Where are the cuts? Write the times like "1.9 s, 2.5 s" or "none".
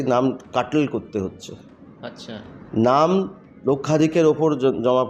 none

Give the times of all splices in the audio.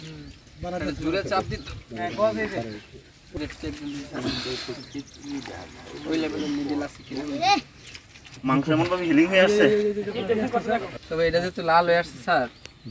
10.9 s

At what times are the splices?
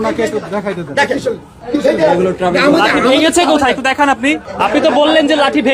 1.5 s, 4.5 s

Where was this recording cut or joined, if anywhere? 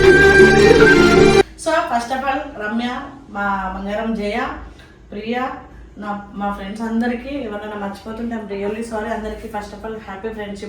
1.5 s

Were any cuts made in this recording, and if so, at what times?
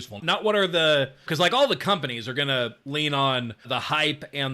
1.2 s, 3.6 s

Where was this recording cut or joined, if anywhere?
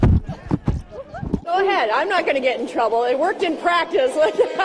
1.1 s

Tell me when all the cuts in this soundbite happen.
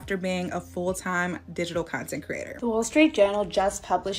2.5 s

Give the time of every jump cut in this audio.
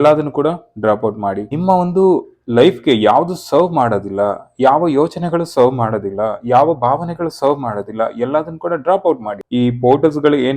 1.5 s, 9.3 s

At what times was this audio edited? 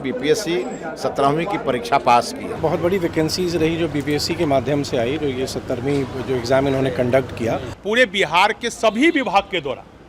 2.6 s, 7.8 s

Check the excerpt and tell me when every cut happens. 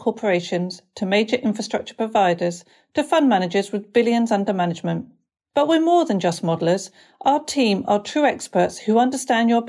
none

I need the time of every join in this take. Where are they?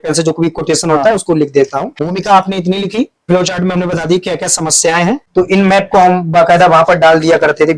1.9 s, 3.2 s, 5.2 s

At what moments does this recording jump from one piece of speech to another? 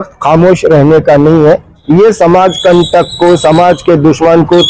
1.8 s

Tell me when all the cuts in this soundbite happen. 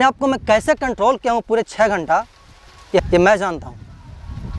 none

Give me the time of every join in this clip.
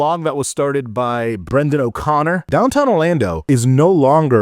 2.4 s, 3.4 s

